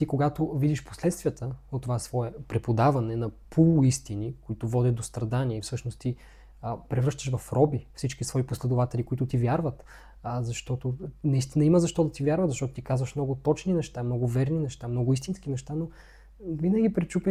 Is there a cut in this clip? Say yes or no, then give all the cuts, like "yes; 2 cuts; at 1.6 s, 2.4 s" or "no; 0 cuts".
no; 0 cuts